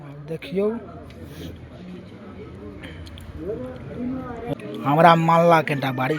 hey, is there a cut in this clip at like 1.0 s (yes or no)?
no